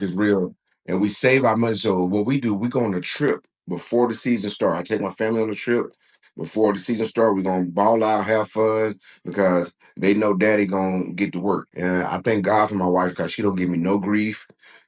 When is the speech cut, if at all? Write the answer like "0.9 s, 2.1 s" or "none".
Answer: 11.7 s